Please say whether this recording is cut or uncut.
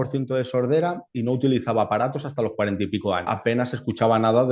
cut